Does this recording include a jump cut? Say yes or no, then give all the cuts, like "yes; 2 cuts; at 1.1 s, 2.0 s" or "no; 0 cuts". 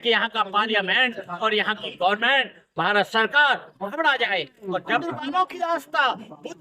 yes; 1 cut; at 5.0 s